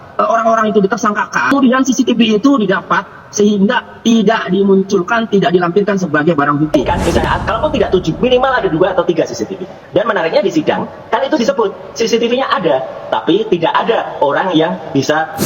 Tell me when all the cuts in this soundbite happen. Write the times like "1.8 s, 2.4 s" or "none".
1.5 s, 6.8 s